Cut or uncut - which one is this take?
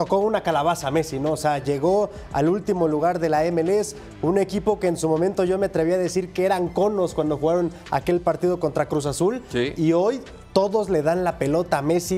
uncut